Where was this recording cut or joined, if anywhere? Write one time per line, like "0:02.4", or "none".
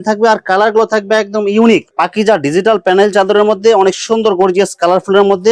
0:01.9